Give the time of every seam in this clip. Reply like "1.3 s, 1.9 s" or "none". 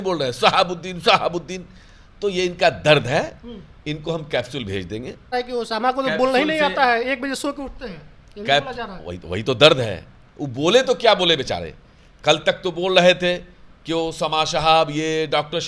5.3 s

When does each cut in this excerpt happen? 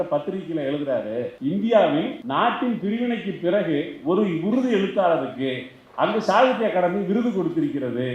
1.3 s, 2.2 s

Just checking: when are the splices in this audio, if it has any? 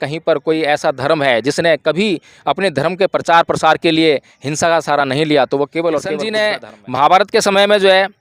6.2 s

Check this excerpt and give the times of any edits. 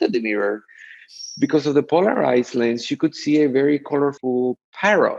4.2 s

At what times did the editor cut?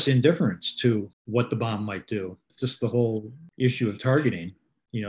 3.4 s

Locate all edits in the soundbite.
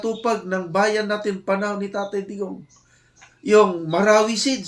none

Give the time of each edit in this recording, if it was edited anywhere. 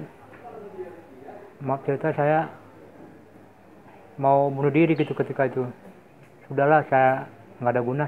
none

